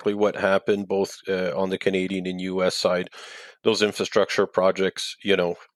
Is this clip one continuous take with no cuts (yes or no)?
yes